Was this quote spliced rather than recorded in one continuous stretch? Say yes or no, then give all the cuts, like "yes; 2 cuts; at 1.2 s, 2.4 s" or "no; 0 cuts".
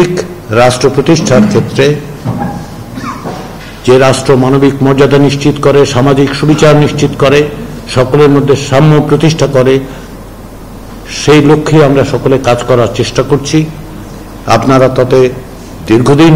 no; 0 cuts